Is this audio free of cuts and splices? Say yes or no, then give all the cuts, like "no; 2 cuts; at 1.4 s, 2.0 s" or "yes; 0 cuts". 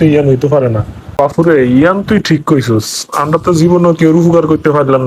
no; 1 cut; at 1.2 s